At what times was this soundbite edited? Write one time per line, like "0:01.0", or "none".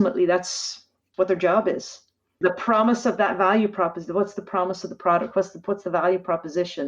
0:01.0
0:02.4

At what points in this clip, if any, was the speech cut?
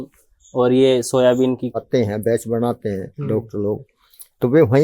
0:01.7

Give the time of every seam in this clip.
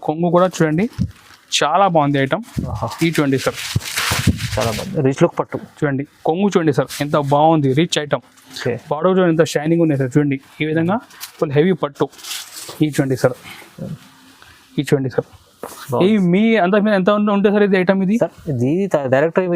none

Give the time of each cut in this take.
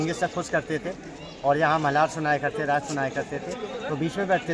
none

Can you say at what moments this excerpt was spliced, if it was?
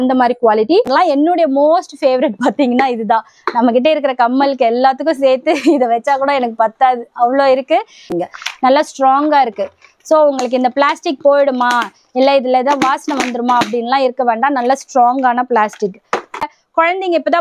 0:00.9
0:08.1
0:16.5

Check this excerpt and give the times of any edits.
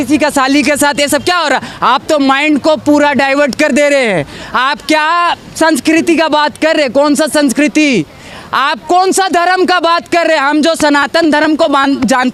none

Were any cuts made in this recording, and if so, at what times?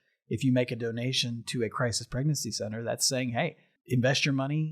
0:03.7

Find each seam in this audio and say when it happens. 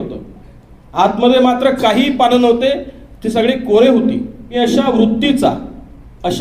0:04.4

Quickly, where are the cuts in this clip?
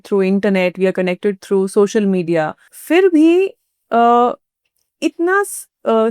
0:02.7

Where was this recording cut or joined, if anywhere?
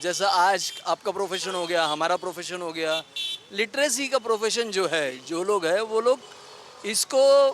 none

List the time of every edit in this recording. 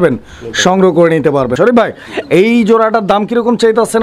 0:01.6

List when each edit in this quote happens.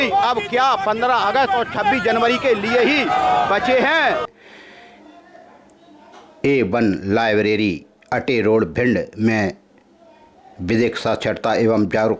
0:04.3

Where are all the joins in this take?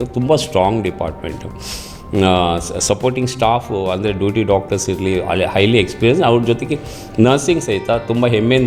none

